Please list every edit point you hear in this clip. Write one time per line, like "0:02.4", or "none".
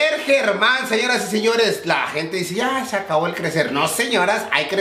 none

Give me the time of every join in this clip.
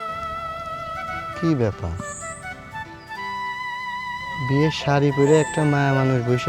0:00.9
0:02.0
0:04.4

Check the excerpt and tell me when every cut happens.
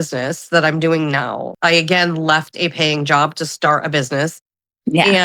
0:01.5

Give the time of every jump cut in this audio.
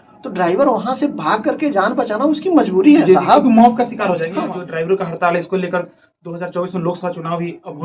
0:04.3

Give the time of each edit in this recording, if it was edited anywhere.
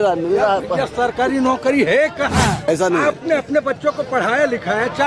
0:02.6

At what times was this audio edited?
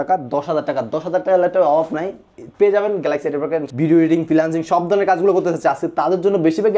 0:03.7

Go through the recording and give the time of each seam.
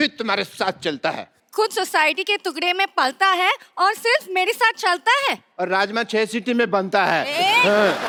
none

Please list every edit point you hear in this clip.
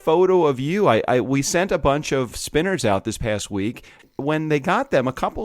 0:02.3
0:04.0

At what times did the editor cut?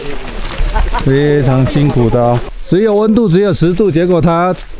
0:02.5

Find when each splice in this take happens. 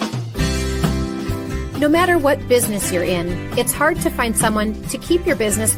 none

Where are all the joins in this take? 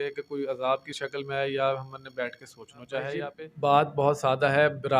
0:03.3

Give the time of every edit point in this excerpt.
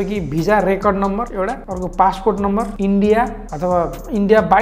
none

